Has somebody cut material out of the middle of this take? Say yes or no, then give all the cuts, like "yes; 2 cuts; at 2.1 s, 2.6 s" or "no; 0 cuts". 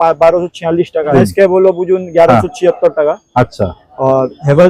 yes; 1 cut; at 1.1 s